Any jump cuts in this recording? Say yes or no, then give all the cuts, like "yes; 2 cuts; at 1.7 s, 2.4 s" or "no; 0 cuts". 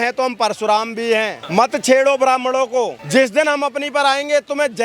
yes; 2 cuts; at 1.4 s, 3.0 s